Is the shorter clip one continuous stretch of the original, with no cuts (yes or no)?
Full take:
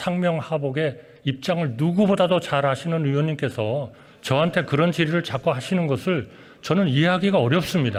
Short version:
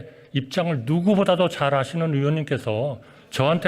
yes